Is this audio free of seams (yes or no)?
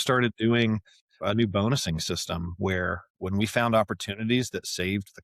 no